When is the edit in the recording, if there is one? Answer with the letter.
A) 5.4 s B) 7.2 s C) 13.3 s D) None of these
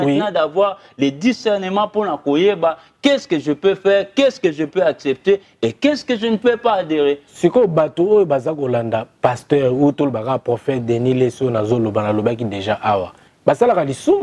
C